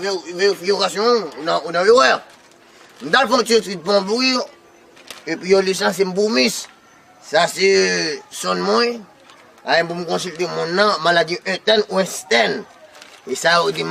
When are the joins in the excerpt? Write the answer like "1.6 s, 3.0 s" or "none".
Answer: none

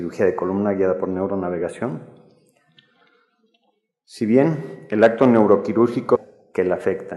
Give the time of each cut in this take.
none

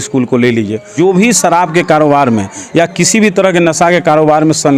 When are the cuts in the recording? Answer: 0.9 s

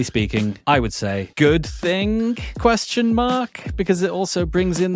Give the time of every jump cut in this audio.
0.8 s, 2.5 s

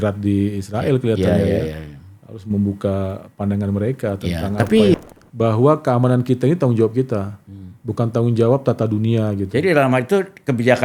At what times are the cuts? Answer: 4.9 s

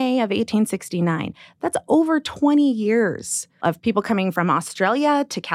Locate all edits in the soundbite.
3.8 s

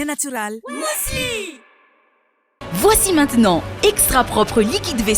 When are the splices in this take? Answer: 2.7 s

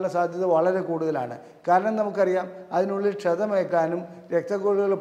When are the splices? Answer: none

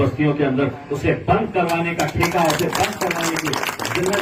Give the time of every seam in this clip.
none

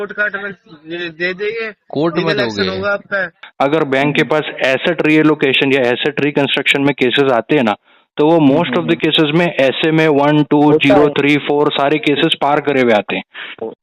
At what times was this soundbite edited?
3.4 s

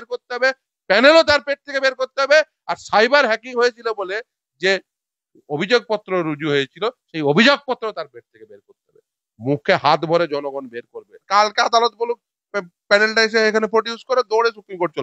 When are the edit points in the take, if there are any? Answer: 11.2 s

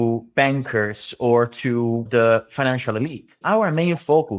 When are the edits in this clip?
2.1 s, 3.4 s

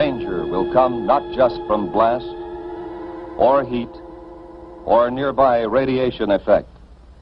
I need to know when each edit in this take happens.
5.7 s

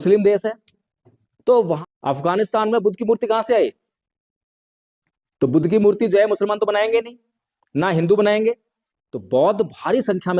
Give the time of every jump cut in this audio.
1.8 s

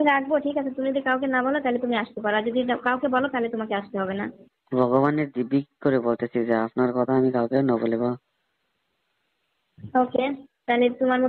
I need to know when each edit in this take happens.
none

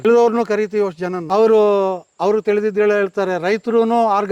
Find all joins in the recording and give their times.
1.1 s

